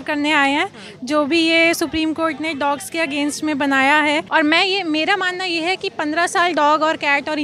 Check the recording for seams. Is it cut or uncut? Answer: cut